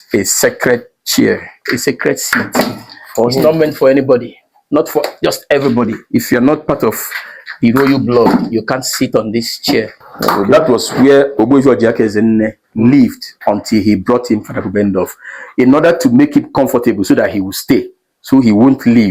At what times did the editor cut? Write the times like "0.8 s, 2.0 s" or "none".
10.4 s